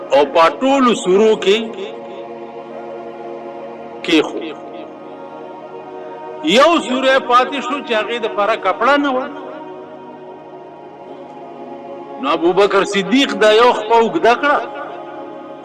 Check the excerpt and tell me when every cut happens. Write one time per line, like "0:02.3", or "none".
0:01.8
0:03.6
0:04.9
0:06.4

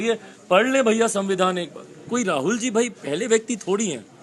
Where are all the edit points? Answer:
0:02.1

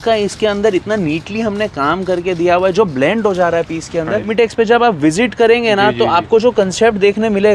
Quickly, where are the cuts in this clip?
0:04.3

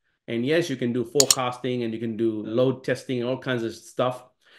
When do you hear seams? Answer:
0:02.5

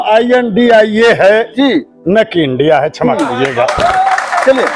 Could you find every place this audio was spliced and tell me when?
none

